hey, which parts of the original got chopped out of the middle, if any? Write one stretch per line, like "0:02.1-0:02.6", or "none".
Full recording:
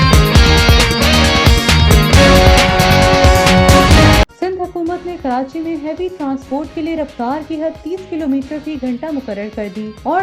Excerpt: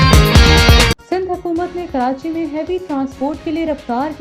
0:01.0-0:04.3